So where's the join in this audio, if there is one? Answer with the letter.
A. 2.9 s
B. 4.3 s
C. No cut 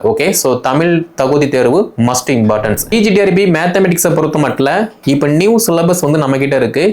A